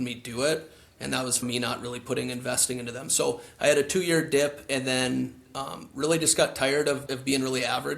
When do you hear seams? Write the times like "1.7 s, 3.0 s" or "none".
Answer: 1.4 s, 7.0 s